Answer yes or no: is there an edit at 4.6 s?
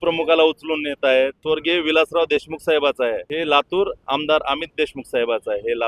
no